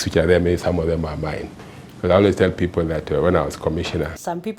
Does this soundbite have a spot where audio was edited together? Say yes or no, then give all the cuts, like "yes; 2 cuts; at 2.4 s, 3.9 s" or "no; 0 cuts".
no; 0 cuts